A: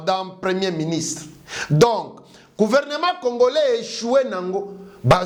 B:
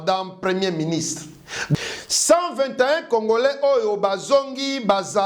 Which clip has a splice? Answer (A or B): B